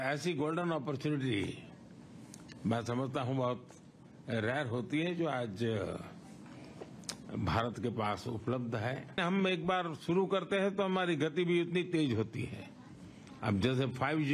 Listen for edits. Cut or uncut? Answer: cut